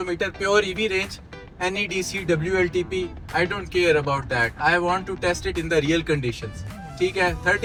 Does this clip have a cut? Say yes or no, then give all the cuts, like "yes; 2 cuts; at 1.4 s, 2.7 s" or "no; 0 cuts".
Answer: no; 0 cuts